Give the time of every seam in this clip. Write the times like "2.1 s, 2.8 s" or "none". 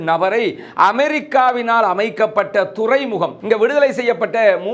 3.3 s